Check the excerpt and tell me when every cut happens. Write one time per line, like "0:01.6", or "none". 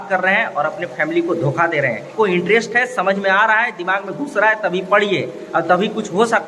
0:02.1